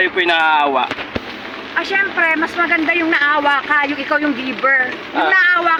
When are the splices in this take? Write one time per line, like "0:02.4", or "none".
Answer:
none